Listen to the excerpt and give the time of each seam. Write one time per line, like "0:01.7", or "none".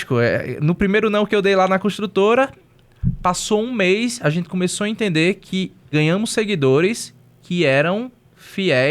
0:05.8